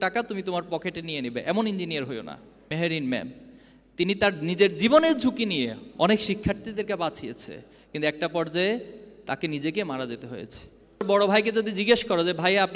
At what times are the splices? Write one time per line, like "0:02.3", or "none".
0:02.5
0:11.0